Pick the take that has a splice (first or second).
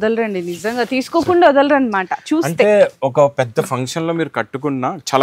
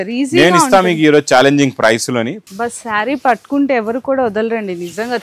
second